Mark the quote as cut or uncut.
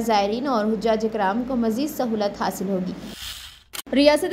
cut